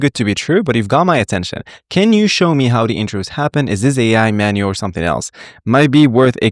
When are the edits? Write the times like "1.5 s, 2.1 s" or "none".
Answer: none